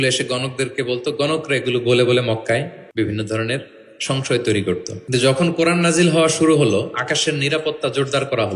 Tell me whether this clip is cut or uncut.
cut